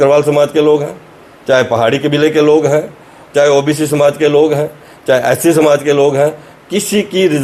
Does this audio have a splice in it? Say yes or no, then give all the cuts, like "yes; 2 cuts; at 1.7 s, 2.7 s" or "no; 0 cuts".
no; 0 cuts